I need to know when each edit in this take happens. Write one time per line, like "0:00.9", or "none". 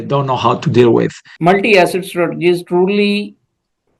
0:01.3